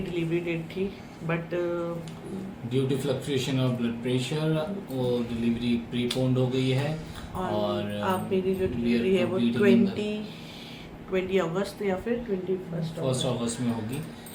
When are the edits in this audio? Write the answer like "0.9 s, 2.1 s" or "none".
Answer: none